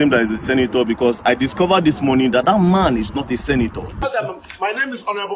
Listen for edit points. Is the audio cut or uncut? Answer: cut